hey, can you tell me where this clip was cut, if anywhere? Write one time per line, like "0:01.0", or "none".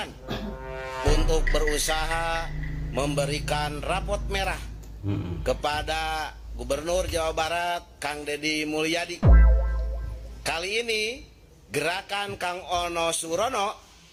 none